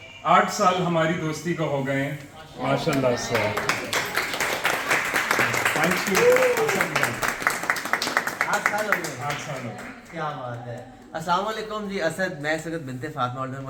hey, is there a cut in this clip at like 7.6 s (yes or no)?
no